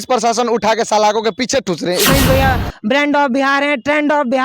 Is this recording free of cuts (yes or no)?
no